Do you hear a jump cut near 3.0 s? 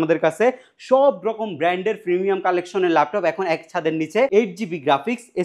no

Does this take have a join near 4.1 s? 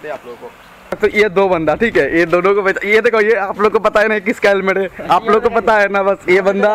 no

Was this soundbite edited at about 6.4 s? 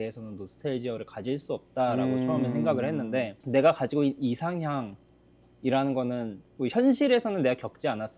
yes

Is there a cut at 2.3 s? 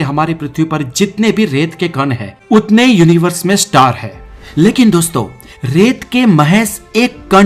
yes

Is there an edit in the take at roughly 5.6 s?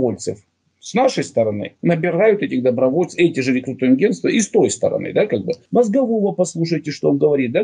yes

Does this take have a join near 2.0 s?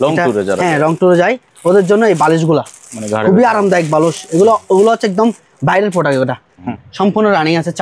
no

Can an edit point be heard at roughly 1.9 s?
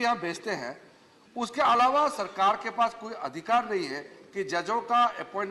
no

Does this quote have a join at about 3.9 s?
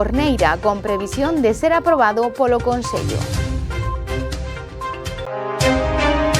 no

